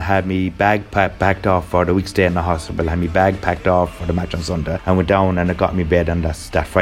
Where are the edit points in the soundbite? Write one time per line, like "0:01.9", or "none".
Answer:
0:04.8